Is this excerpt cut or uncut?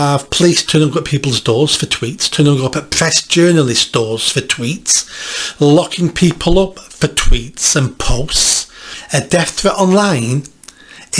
cut